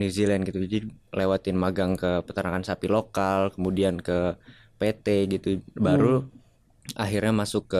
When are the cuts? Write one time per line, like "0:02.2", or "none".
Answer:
none